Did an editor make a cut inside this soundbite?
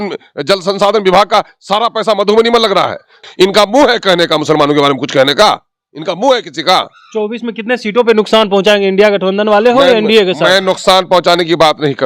yes; 1 cut; at 3.2 s

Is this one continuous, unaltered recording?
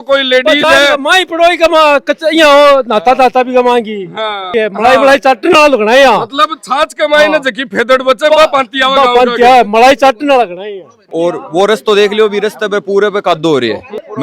no; 2 cuts; at 4.5 s, 11.0 s

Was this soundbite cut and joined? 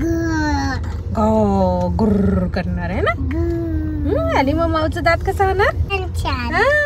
yes; 1 cut; at 5.9 s

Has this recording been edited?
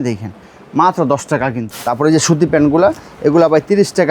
yes; 1 cut; at 1.6 s

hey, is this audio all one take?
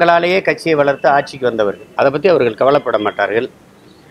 yes; 0 cuts

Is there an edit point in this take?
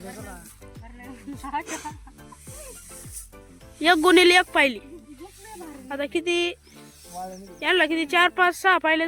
no; 0 cuts

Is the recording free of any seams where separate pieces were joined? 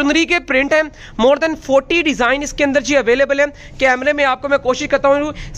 yes; 0 cuts

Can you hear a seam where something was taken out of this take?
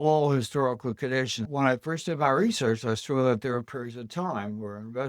yes; 1 cut; at 1.4 s

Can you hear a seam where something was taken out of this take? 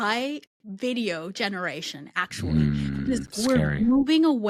no; 0 cuts

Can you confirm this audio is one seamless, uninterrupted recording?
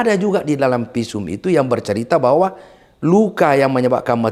yes; 0 cuts

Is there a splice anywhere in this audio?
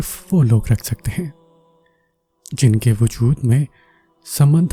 no; 0 cuts

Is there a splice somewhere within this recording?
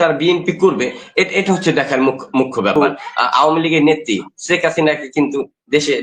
yes; 1 cut; at 2.7 s

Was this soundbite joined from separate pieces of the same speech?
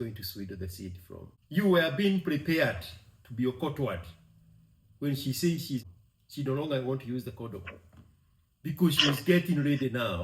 yes; 2 cuts; at 1.3 s, 5.8 s

